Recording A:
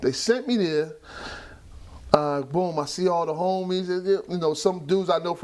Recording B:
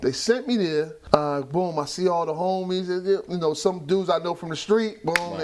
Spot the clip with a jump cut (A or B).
B